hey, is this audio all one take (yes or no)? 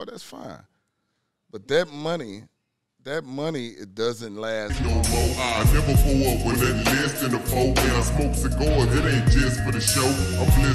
no